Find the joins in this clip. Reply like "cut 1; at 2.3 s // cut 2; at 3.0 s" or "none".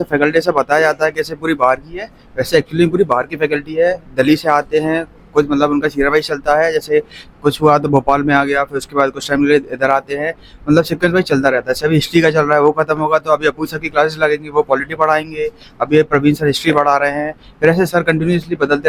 none